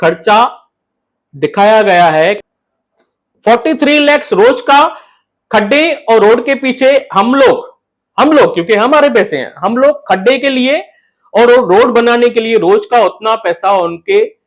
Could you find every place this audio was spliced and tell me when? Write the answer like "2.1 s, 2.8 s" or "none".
2.4 s